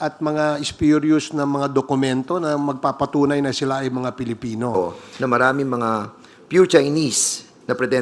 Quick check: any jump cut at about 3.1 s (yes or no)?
no